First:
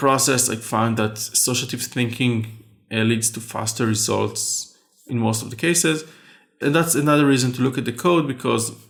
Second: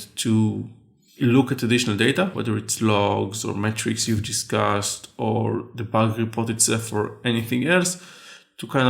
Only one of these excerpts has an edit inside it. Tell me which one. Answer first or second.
second